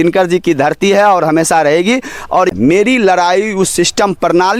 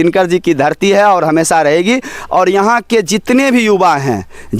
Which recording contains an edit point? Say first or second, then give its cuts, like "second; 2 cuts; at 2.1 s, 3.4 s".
first; 1 cut; at 2.5 s